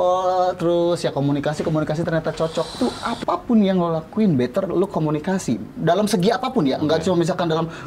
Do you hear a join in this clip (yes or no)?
yes